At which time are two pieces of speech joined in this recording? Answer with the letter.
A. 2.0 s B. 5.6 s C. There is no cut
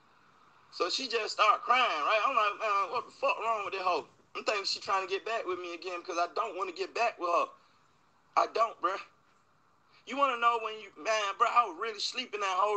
A